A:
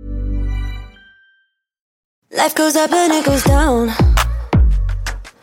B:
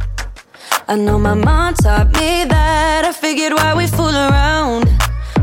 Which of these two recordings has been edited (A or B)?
A